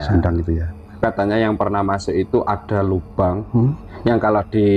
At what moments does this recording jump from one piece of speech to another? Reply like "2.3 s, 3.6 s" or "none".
0.9 s, 3.9 s